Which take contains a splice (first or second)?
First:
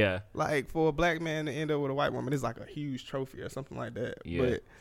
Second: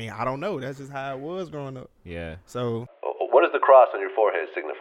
second